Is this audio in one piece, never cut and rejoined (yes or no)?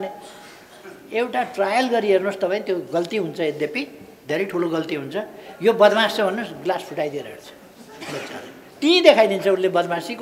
yes